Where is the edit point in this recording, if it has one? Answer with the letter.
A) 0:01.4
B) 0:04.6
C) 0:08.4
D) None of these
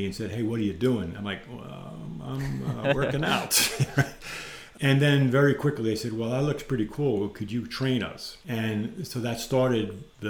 B